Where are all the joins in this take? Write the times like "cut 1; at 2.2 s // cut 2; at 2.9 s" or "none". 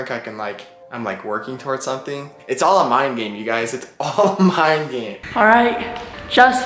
cut 1; at 5.1 s